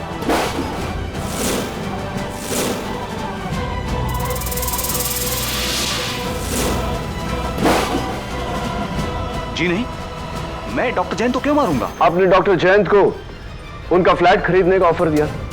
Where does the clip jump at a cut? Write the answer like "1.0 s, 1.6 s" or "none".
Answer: 7.1 s